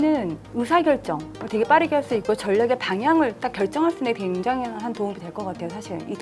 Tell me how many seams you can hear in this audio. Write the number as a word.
zero